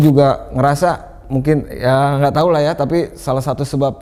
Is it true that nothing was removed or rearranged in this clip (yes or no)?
yes